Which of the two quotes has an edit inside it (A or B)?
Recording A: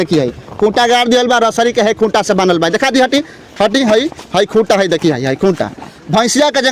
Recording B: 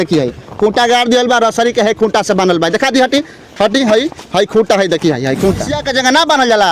B